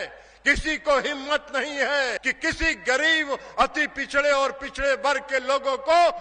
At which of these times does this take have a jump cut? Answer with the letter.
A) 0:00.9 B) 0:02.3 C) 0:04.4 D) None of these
B